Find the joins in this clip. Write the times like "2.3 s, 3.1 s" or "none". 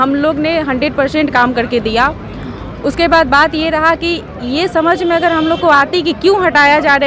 none